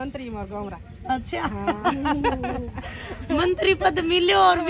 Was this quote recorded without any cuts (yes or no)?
yes